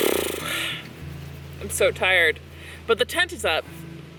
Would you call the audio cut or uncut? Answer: uncut